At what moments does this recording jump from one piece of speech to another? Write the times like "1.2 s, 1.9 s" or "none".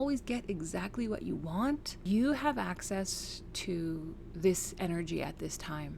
2.0 s